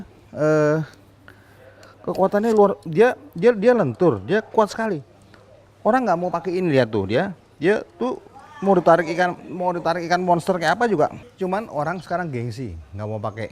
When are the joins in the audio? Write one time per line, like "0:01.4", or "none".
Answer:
0:11.2